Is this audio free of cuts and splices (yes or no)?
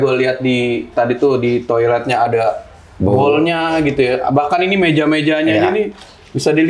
yes